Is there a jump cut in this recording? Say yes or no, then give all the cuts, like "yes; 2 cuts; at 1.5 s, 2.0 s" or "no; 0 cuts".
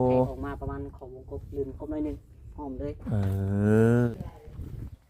yes; 1 cut; at 4.1 s